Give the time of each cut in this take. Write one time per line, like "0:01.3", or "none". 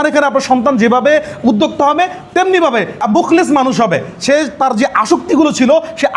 0:03.0